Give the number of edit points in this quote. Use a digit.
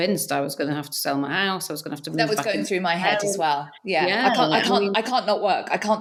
0